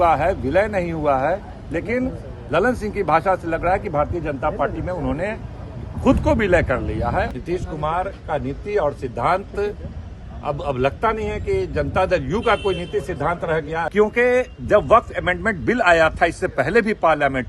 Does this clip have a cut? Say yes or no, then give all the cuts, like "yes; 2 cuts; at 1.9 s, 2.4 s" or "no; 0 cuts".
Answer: yes; 2 cuts; at 7.3 s, 13.9 s